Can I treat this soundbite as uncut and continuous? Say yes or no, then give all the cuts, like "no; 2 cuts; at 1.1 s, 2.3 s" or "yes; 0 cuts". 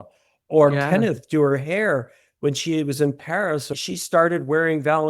no; 1 cut; at 3.8 s